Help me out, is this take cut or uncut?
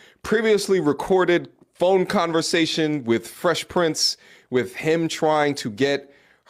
uncut